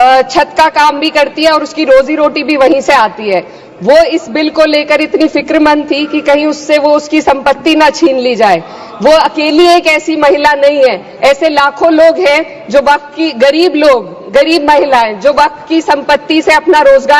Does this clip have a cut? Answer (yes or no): no